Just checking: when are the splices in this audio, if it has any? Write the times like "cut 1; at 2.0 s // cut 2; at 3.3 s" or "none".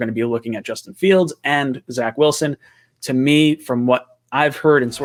none